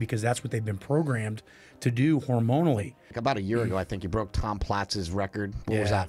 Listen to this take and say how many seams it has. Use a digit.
1